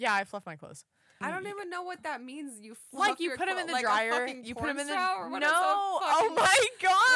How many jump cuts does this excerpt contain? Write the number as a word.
one